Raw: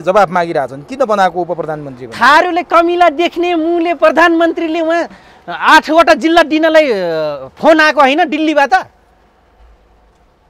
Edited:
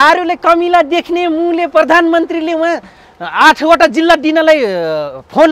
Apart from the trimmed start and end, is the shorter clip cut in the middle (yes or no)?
no